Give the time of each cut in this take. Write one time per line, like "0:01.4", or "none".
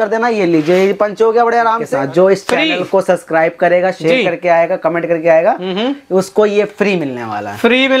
0:01.9